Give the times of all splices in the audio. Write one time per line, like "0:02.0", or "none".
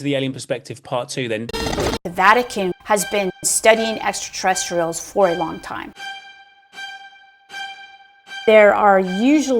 0:01.5